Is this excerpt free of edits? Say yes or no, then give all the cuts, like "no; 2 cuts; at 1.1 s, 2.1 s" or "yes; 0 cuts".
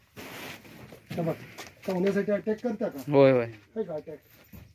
yes; 0 cuts